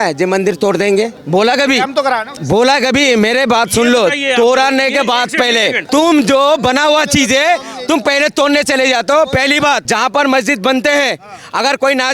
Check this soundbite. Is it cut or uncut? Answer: cut